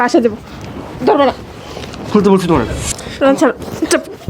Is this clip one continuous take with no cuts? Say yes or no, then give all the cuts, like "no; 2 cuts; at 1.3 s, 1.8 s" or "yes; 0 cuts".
no; 1 cut; at 3.0 s